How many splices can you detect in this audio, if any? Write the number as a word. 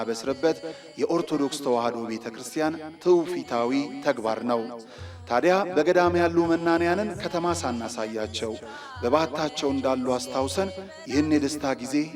zero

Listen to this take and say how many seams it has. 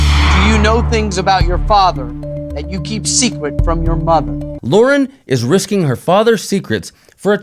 one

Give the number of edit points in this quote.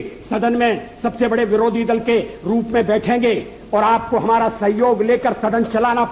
zero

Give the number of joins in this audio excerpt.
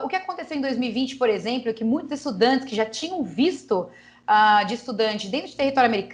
zero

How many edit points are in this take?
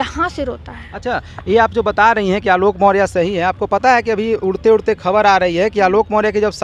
zero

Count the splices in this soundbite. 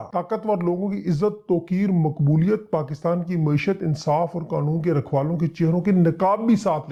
zero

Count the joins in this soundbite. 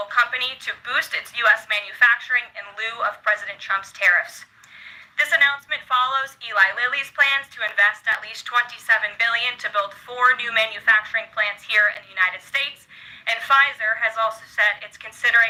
zero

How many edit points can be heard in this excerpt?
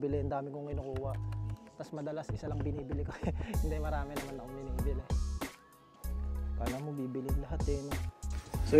zero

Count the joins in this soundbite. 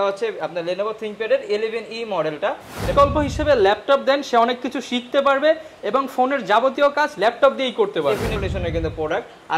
two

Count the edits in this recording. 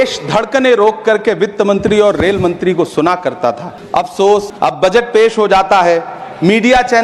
two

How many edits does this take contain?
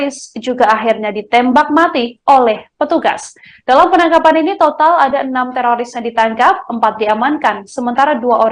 zero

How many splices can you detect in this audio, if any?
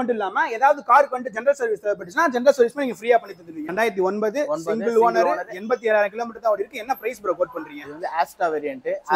one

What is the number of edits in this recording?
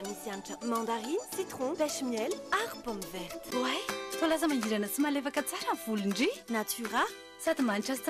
one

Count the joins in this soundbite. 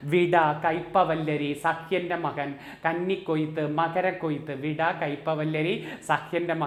zero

